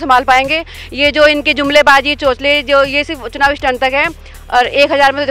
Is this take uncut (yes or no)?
yes